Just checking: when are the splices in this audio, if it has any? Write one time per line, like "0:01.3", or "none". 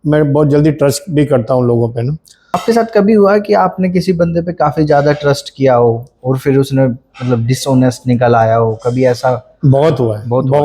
0:02.3